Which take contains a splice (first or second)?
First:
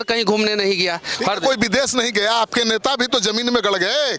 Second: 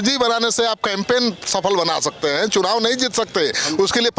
first